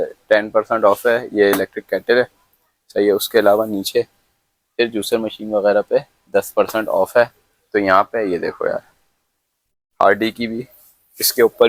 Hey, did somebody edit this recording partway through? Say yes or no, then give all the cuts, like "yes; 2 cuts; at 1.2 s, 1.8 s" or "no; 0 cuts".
no; 0 cuts